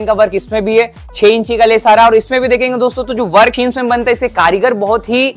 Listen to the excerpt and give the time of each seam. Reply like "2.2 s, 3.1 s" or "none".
3.5 s